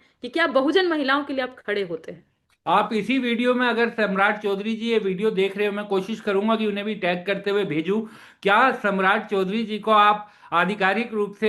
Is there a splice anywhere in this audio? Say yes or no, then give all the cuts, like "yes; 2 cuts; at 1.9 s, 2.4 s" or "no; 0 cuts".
no; 0 cuts